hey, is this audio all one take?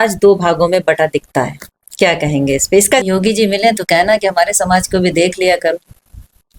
no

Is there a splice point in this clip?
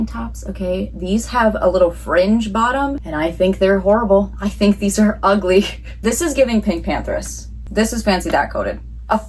yes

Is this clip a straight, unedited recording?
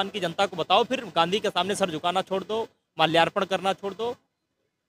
yes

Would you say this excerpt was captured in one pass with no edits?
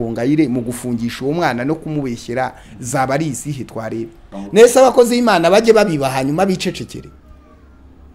no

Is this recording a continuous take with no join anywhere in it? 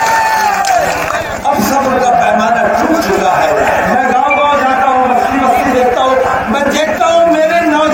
yes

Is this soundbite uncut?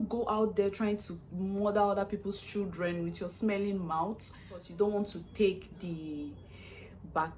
no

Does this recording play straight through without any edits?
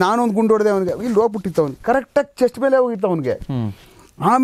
yes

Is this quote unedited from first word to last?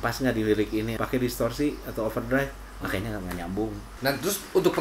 no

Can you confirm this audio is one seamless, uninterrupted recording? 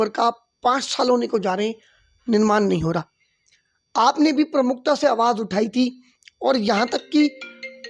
yes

